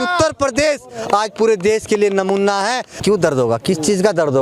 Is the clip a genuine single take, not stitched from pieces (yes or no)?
no